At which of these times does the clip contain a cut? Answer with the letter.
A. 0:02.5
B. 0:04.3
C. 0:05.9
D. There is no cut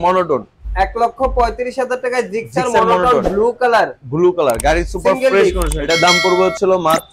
C